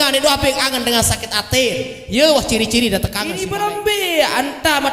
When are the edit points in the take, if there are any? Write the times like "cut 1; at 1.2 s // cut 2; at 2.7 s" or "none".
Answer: cut 1; at 3.4 s